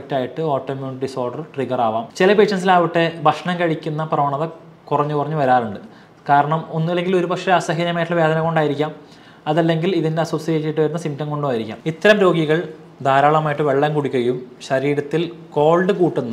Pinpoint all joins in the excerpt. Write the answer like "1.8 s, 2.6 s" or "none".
2.1 s, 11.7 s